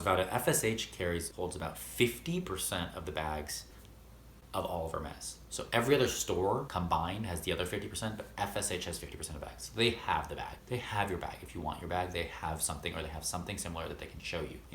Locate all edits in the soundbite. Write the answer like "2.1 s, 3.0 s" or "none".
none